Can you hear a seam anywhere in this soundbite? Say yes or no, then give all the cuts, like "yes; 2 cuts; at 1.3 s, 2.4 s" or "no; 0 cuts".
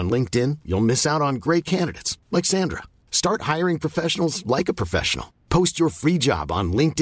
no; 0 cuts